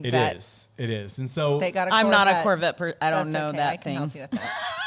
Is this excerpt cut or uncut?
uncut